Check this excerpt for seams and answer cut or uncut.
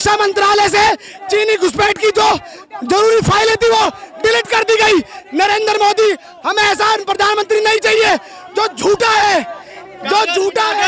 uncut